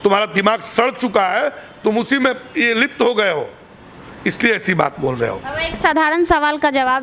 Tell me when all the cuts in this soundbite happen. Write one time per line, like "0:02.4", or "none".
none